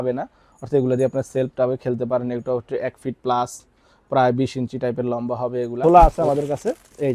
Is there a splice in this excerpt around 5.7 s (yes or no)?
yes